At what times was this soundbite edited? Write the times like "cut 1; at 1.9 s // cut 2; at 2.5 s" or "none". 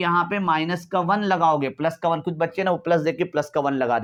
none